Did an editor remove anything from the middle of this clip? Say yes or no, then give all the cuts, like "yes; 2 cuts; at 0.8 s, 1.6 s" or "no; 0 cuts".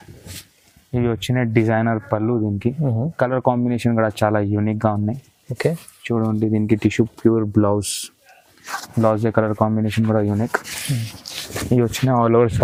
no; 0 cuts